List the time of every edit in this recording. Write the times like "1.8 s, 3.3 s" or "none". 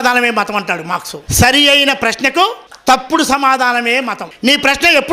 1.2 s, 2.7 s, 4.3 s